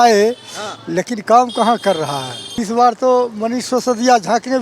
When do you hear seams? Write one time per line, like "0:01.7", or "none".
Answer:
0:02.6